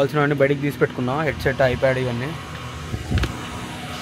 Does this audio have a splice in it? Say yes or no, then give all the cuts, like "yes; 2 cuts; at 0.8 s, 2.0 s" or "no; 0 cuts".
no; 0 cuts